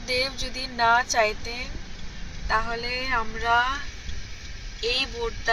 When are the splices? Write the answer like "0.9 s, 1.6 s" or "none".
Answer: none